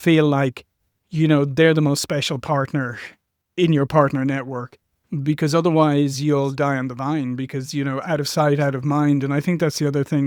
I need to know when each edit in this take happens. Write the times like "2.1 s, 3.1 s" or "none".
none